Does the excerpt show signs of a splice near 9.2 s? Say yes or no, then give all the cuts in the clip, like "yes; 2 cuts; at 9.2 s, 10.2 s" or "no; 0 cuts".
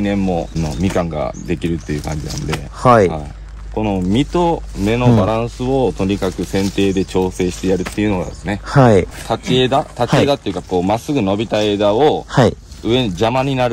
yes; 1 cut; at 9.2 s